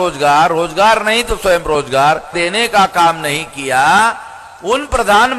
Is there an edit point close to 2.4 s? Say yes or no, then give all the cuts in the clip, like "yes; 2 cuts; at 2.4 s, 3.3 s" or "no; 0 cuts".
yes; 1 cut; at 2.4 s